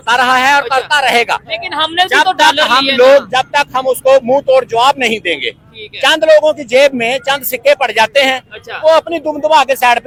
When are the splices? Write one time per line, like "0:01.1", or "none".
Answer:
none